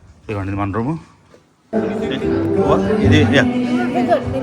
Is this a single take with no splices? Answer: no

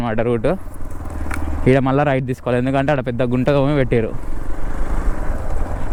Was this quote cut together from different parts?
no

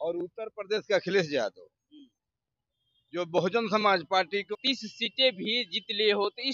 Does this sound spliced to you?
yes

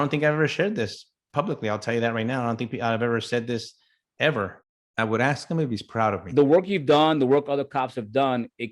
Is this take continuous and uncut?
no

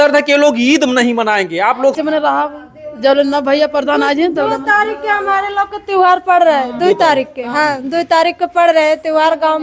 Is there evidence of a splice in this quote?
yes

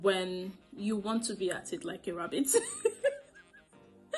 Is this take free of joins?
yes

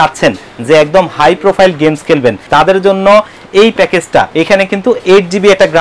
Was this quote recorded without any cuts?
no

